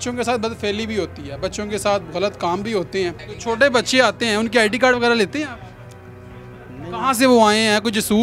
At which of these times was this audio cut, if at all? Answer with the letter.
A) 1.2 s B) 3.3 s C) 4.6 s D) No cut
B